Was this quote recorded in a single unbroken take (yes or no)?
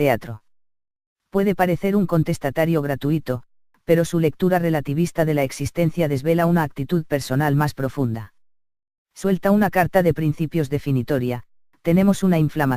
no